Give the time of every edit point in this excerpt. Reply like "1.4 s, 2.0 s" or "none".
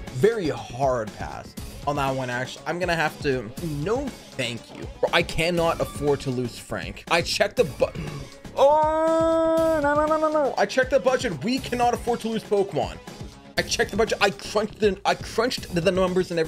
3.6 s, 4.9 s, 6.9 s